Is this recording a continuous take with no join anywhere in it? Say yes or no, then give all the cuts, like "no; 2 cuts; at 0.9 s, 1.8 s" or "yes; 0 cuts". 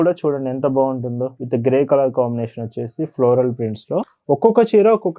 no; 1 cut; at 4.1 s